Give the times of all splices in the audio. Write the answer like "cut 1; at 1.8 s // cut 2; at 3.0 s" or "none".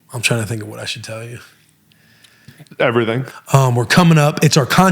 cut 1; at 2.5 s // cut 2; at 3.2 s

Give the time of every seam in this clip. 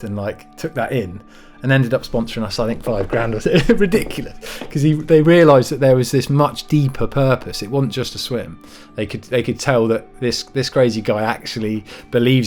none

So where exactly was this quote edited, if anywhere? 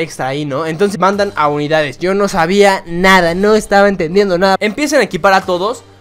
cut 1; at 0.9 s // cut 2; at 4.6 s

